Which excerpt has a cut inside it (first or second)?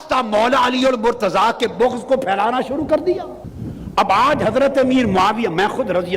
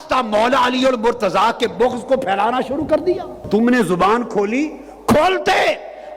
second